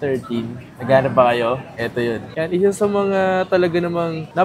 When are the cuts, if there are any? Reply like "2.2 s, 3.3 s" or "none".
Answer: 2.3 s